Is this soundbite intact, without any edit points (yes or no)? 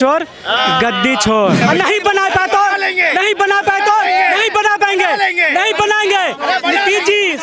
no